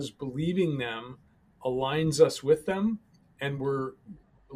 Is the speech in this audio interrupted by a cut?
no; 0 cuts

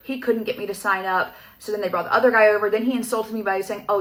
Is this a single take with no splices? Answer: yes; 0 cuts

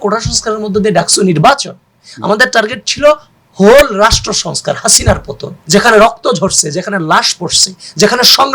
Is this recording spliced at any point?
yes; 1 cut; at 5.5 s

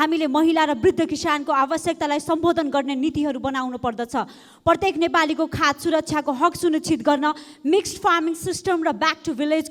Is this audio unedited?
yes; 0 cuts

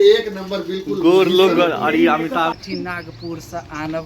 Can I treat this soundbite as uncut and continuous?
no; 1 cut; at 2.6 s

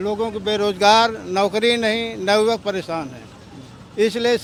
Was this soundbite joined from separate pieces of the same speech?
no; 0 cuts

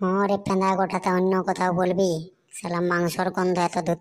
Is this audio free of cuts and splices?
yes; 0 cuts

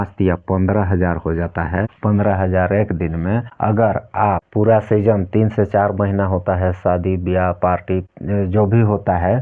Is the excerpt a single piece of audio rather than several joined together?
yes; 0 cuts

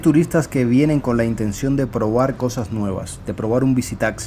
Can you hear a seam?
no; 0 cuts

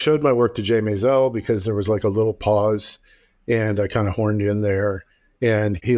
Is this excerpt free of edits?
yes; 0 cuts

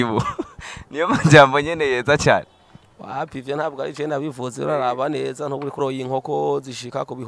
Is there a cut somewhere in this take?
yes; 1 cut; at 5.8 s

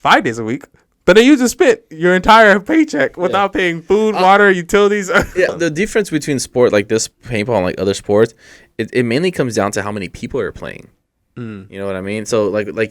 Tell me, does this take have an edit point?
yes; 1 cut; at 5.5 s

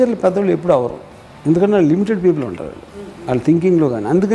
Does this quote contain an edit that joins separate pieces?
no; 0 cuts

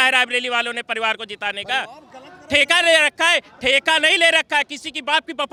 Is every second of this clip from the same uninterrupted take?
yes; 0 cuts

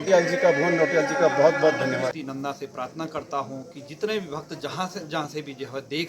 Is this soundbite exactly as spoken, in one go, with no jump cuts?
no; 1 cut; at 2.1 s

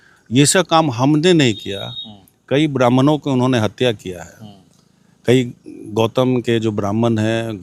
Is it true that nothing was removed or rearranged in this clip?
yes; 0 cuts

